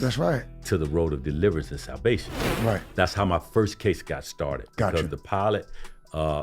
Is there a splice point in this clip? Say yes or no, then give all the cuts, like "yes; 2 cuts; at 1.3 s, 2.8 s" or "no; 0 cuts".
yes; 1 cut; at 2.4 s